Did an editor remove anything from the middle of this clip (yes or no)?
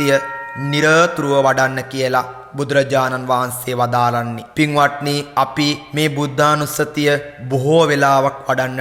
yes